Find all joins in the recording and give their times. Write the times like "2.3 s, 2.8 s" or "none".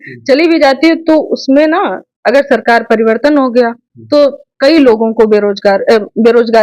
none